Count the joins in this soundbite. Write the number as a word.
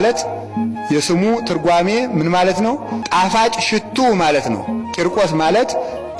one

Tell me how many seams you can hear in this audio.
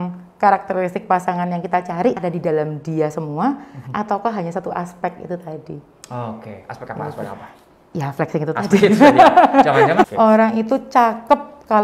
two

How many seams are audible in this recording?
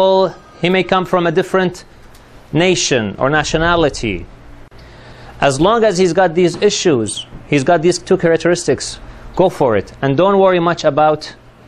one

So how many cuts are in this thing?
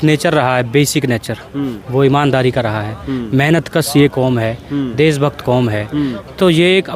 zero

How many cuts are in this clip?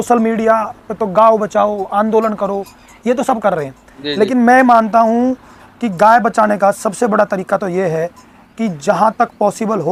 zero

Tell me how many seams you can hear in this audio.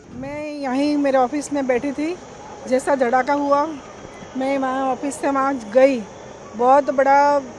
zero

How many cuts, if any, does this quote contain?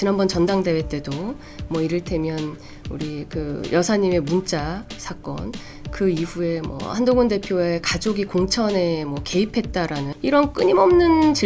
two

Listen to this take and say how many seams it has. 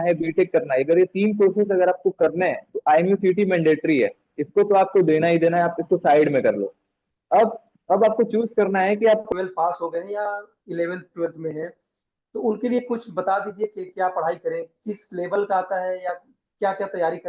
one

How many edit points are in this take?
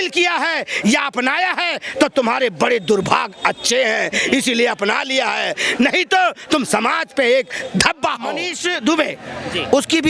one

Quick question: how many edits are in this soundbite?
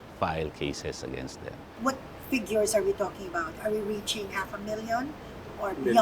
one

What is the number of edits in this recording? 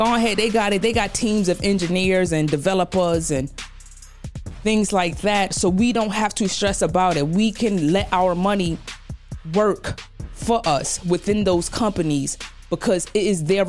zero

